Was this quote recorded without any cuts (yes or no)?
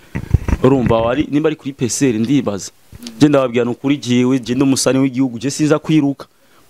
yes